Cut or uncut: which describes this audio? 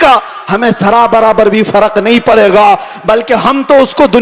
uncut